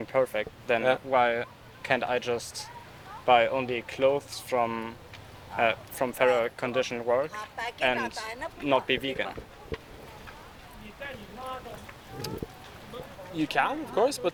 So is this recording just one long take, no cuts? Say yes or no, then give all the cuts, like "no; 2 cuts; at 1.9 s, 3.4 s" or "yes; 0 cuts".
yes; 0 cuts